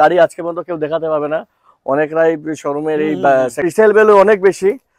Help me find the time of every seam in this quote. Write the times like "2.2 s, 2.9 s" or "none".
3.7 s